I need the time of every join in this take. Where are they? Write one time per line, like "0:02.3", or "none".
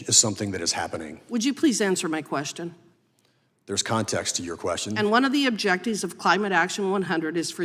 none